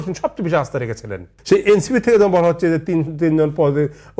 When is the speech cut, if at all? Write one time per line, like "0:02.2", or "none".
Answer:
0:01.3